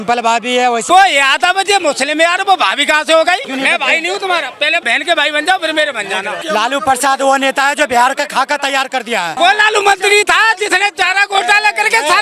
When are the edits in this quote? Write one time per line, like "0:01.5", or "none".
0:00.8
0:03.5
0:04.8
0:06.3
0:09.3